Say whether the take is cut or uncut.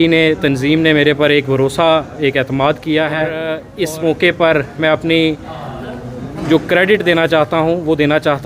cut